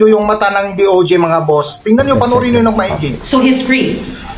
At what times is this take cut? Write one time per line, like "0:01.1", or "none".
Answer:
0:03.1